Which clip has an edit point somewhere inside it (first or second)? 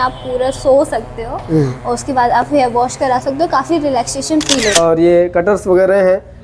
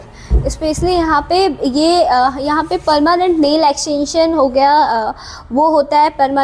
first